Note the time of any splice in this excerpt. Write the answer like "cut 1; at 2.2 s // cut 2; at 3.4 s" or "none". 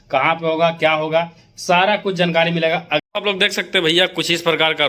cut 1; at 3.0 s